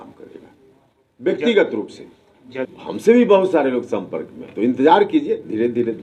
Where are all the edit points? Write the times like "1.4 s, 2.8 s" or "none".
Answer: 2.7 s